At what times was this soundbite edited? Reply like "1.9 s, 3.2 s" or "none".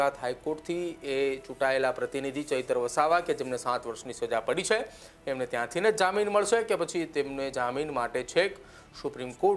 none